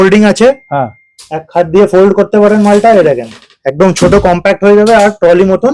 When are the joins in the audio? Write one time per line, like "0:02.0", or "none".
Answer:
none